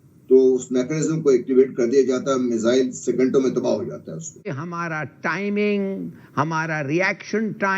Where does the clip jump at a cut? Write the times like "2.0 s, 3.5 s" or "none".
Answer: 4.5 s